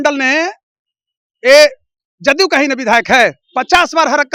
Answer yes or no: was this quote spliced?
no